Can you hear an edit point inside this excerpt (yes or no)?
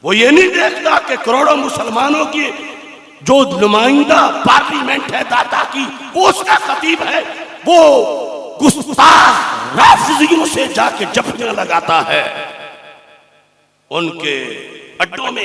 no